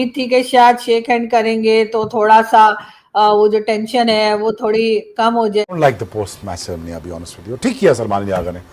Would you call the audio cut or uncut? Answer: cut